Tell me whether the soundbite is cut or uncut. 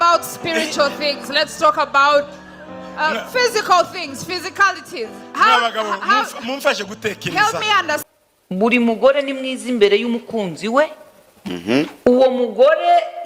cut